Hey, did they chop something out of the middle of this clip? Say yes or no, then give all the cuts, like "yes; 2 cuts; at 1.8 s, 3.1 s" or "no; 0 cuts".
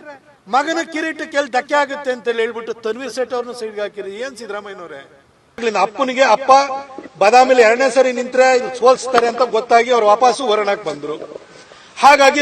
yes; 1 cut; at 5.4 s